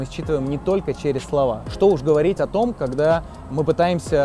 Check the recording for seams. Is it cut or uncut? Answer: cut